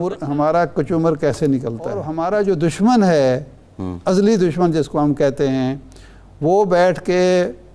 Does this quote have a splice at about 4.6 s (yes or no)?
no